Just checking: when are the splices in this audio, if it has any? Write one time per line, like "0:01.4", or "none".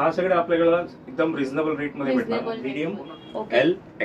0:02.7